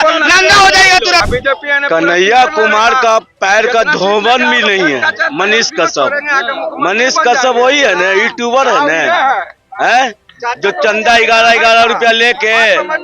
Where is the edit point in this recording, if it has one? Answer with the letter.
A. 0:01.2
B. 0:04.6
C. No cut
A